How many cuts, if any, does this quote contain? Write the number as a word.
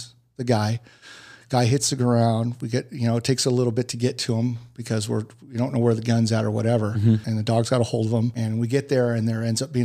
two